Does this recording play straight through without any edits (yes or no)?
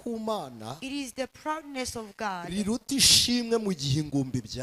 yes